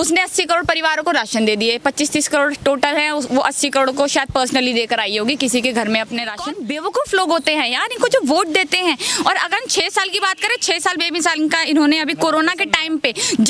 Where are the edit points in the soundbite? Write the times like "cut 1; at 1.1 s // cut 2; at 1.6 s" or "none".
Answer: cut 1; at 6.4 s